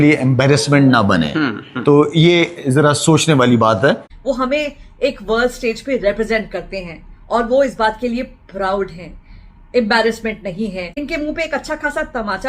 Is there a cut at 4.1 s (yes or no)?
yes